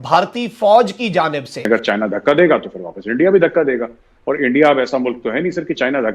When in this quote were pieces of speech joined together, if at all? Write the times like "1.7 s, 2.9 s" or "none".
1.7 s